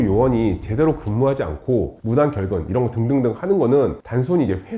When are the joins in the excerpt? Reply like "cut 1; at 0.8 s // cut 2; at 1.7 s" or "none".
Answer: none